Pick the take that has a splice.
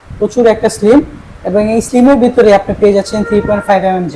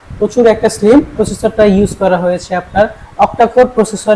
second; 1 cut; at 1.3 s

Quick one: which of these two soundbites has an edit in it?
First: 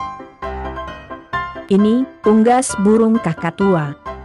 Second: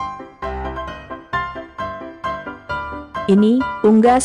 second; 2 cuts; at 1.6 s, 3.3 s

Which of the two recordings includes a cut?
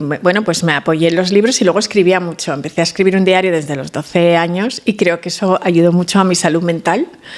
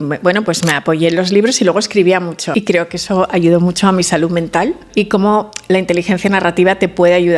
second; 2 cuts; at 2.4 s, 4.8 s

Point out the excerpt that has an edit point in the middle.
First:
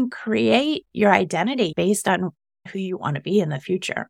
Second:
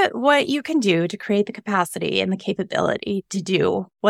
first; 1 cut; at 1.7 s

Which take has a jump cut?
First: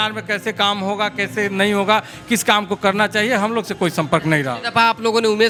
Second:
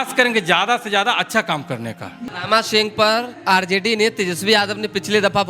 second; 1 cut; at 2.2 s

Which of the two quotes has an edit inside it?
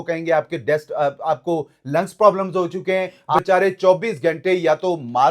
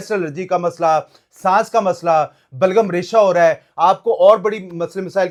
first; 1 cut; at 3.4 s

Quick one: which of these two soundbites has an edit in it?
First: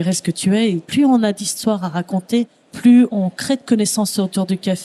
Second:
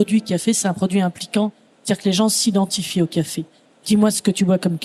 first; 2 cuts; at 0.9 s, 3.1 s

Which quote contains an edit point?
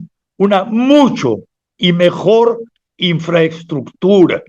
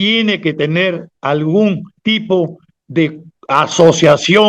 second; 3 cuts; at 1.1 s, 1.9 s, 3.3 s

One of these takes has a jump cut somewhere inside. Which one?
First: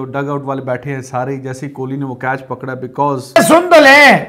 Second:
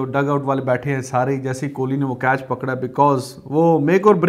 first; 1 cut; at 3.3 s

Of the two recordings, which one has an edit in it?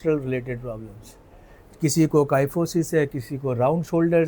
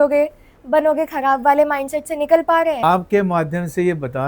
second; 1 cut; at 2.8 s

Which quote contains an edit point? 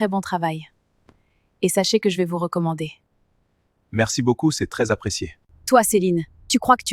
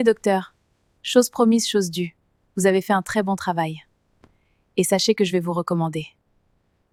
first; 1 cut; at 5.5 s

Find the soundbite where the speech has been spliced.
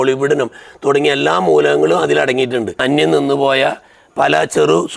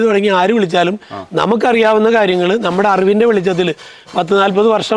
first; 1 cut; at 2.8 s

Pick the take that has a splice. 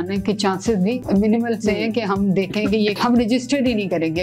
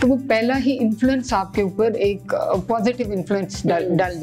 first; 2 cuts; at 1.0 s, 3.0 s

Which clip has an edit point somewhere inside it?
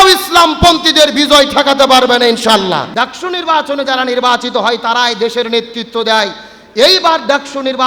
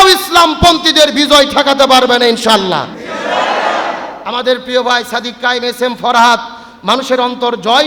first; 1 cut; at 2.9 s

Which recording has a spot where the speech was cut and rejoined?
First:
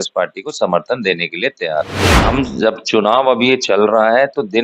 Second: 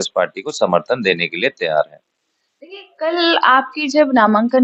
first; 1 cut; at 2.0 s

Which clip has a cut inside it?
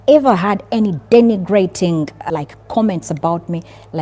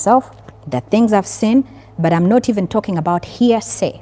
first; 1 cut; at 2.3 s

